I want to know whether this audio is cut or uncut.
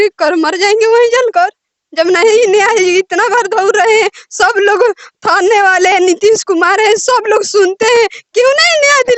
uncut